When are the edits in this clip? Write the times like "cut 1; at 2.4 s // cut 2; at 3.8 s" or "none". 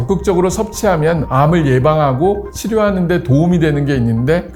none